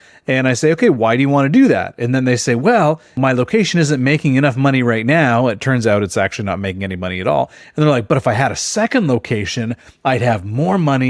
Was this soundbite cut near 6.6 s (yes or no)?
no